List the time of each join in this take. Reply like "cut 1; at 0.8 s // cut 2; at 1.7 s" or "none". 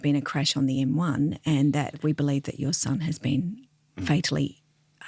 cut 1; at 2.0 s